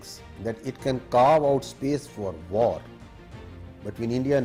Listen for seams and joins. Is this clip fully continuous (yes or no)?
yes